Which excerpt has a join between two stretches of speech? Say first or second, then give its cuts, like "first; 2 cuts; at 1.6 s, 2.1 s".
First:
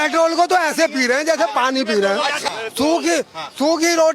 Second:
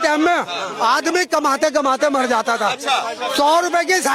first; 1 cut; at 2.4 s